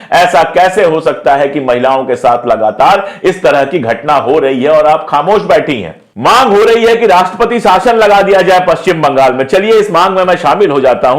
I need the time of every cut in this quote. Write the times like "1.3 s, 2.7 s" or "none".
6.0 s